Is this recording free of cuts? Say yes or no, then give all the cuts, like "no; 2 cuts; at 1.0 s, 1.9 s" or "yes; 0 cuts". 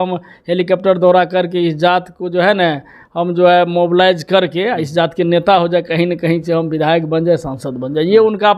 yes; 0 cuts